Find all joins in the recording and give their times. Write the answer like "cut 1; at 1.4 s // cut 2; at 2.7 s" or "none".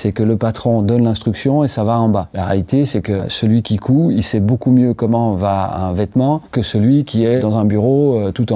cut 1; at 3.3 s // cut 2; at 6.5 s // cut 3; at 7.4 s